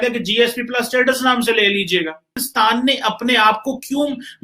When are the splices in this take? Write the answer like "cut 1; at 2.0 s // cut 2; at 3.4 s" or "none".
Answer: cut 1; at 2.4 s